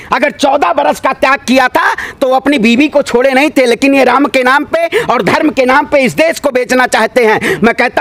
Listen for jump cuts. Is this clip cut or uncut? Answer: uncut